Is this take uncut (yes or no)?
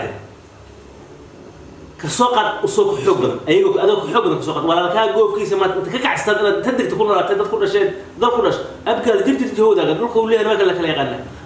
no